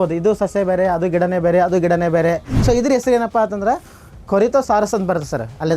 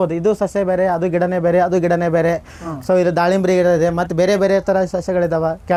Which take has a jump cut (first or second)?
first